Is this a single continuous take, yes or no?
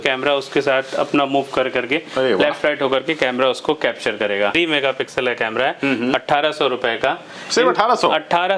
no